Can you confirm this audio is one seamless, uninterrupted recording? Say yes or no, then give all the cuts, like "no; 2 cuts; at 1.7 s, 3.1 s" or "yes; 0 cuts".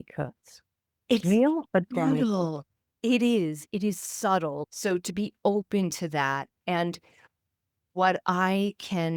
no; 1 cut; at 4.6 s